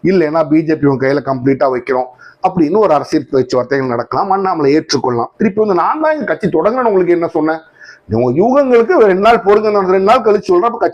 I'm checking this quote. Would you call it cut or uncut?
uncut